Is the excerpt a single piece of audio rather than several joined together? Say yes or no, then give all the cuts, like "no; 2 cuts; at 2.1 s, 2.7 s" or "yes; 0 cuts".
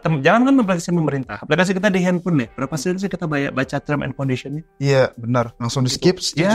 yes; 0 cuts